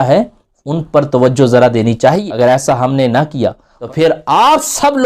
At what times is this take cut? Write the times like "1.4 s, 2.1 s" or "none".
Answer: 2.2 s, 3.7 s